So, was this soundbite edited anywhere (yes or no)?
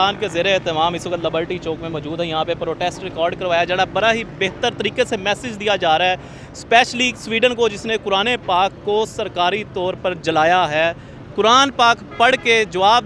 no